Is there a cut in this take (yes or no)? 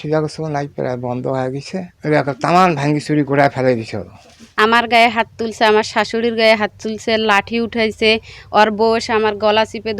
yes